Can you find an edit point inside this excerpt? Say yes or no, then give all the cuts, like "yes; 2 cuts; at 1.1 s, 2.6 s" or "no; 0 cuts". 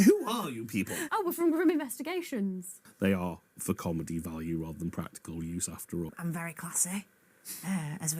yes; 3 cuts; at 1.0 s, 2.8 s, 6.1 s